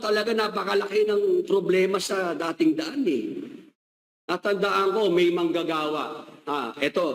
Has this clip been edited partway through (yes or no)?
no